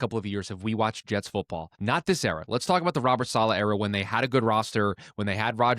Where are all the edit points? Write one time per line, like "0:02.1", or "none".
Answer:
0:01.6